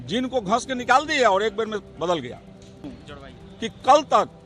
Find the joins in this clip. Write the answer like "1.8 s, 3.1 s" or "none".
2.8 s